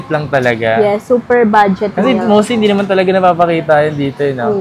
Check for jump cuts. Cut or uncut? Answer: uncut